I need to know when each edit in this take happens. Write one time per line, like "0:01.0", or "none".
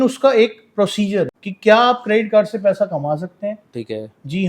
0:01.4